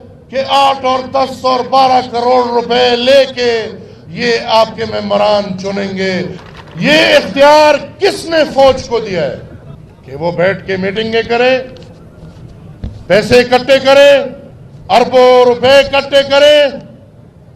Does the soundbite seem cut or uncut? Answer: cut